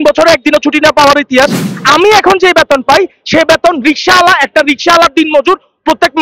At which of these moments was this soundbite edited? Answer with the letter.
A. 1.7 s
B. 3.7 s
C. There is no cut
A